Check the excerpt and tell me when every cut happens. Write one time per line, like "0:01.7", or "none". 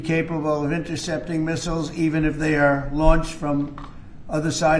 none